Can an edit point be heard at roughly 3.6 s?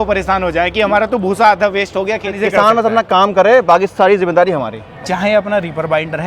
no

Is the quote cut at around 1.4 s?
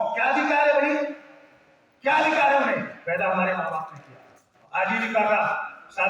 no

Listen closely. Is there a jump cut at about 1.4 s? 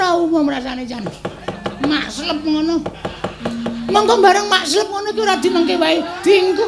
yes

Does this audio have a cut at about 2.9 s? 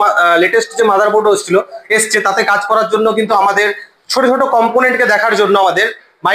no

